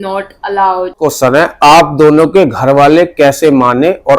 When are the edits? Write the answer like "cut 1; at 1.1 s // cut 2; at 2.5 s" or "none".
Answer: cut 1; at 1.0 s